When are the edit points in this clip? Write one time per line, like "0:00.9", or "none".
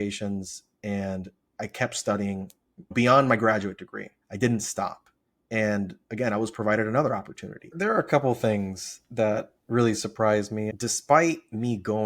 0:04.2
0:07.7
0:10.7